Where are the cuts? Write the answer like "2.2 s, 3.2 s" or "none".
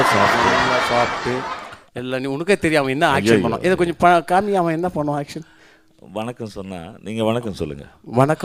none

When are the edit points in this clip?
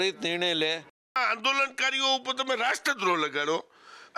1.2 s

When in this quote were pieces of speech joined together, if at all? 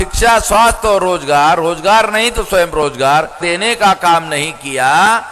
3.5 s

